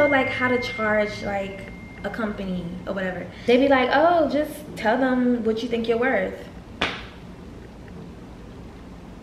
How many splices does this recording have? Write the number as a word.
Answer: one